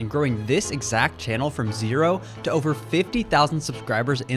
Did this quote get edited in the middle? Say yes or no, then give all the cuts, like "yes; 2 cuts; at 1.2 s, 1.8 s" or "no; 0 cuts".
no; 0 cuts